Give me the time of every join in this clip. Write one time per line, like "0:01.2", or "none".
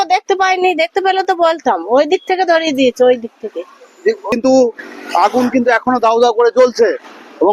0:04.3